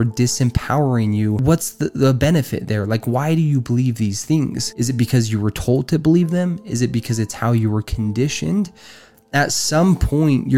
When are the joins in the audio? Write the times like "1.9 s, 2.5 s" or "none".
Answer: 1.4 s, 4.6 s